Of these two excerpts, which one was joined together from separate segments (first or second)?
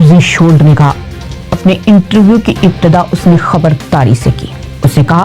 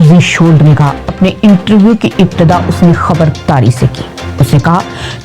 second